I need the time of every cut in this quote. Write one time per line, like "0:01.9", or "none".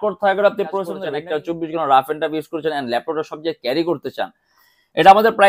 0:01.0